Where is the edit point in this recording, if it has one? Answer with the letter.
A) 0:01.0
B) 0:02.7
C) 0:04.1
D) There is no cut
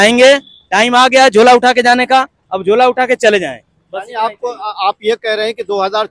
D